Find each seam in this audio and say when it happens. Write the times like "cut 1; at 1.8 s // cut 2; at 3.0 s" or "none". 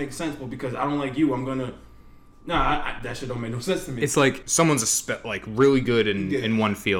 cut 1; at 4.4 s